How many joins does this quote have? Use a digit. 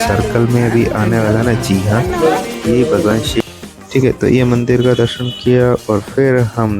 1